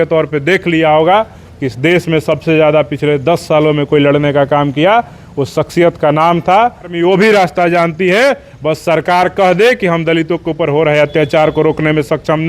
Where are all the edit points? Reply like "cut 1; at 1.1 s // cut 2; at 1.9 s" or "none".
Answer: cut 1; at 6.9 s